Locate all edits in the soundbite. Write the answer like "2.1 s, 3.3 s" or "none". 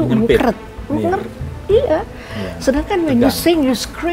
none